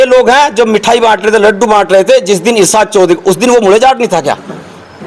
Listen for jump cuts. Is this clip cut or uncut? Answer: uncut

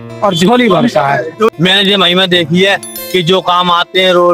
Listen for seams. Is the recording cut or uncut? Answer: cut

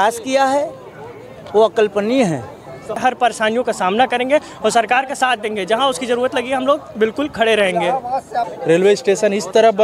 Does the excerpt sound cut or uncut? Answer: cut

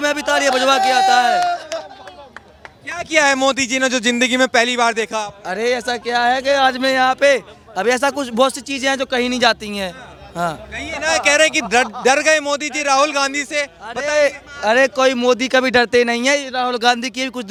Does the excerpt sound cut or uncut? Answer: uncut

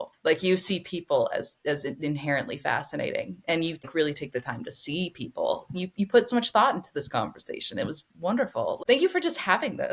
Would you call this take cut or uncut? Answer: cut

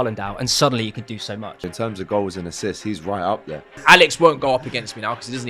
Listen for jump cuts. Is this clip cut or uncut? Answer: cut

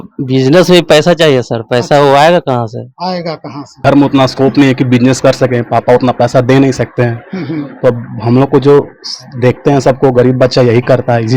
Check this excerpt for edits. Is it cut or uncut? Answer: cut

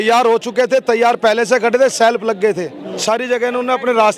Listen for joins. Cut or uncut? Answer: cut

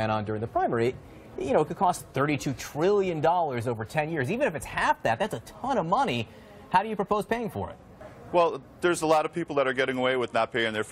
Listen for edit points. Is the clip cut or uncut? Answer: cut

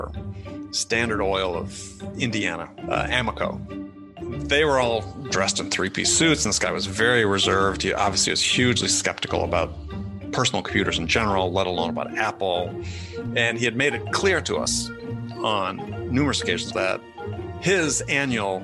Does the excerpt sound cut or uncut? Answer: uncut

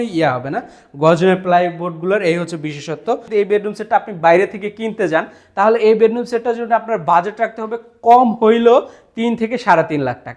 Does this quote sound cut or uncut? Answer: cut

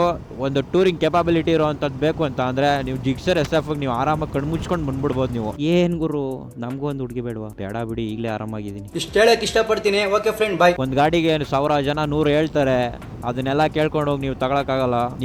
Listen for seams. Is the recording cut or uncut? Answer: cut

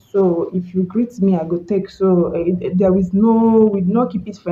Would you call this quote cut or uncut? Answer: uncut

